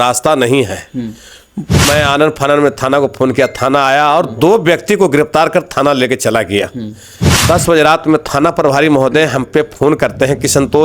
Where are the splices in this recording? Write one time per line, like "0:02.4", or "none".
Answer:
0:01.9
0:07.4